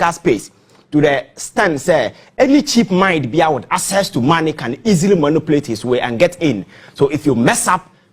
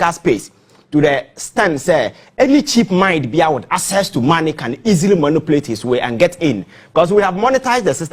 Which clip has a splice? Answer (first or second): first